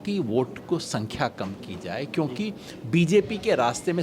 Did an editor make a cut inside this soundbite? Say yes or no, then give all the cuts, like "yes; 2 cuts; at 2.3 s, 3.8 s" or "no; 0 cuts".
no; 0 cuts